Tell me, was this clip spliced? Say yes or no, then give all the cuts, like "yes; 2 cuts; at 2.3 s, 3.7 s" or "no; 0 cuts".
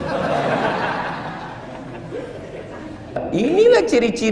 yes; 1 cut; at 3.2 s